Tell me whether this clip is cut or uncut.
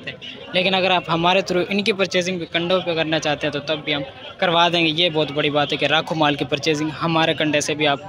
uncut